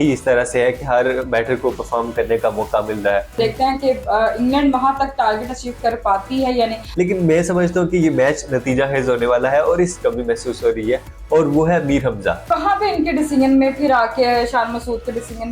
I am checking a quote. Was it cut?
yes; 4 cuts; at 3.3 s, 6.8 s, 10.0 s, 12.4 s

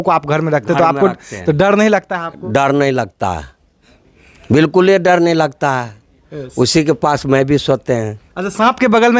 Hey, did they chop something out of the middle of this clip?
no; 0 cuts

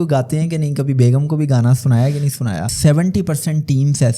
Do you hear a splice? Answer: yes; 1 cut; at 2.7 s

